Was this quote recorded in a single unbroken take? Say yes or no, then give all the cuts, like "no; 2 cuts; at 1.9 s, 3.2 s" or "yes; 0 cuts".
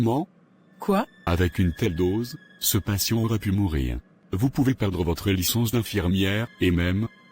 no; 3 cuts; at 1.2 s, 4.2 s, 6.5 s